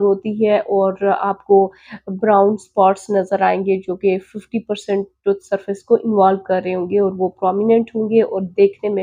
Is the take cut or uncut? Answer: uncut